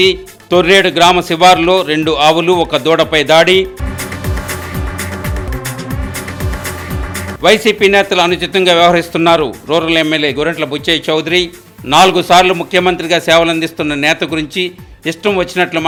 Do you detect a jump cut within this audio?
no; 0 cuts

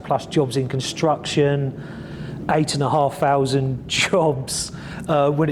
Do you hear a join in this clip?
no; 0 cuts

